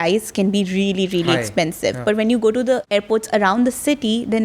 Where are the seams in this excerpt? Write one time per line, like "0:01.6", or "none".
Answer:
0:02.8